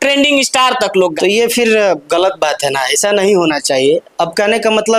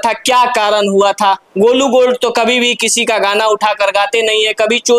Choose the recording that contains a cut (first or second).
first